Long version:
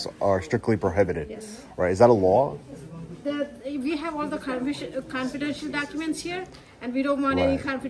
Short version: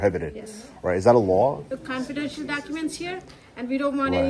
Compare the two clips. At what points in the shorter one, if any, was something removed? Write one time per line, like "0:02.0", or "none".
0:01.6